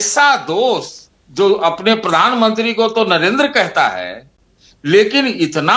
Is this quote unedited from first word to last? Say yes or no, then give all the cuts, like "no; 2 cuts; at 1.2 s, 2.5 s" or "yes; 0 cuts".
yes; 0 cuts